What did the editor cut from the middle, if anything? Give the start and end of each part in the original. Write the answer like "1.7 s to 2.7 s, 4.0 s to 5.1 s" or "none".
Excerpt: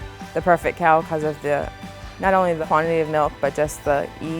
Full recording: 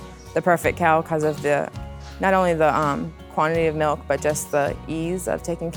2.6 s to 3.2 s